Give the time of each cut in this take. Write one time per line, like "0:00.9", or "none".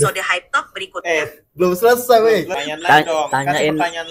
0:02.6

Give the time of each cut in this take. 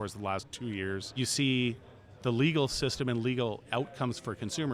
0:01.1

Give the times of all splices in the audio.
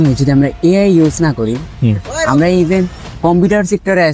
0:03.0

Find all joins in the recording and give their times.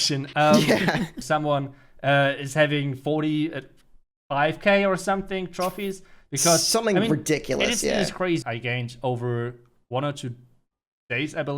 0:01.2
0:08.4

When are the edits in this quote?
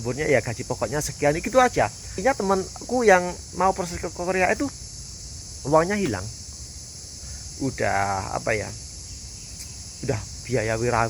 0:02.2

